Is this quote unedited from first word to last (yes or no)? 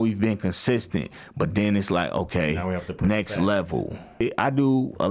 no